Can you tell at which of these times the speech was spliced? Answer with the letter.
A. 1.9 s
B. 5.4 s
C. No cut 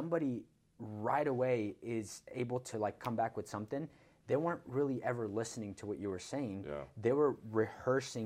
C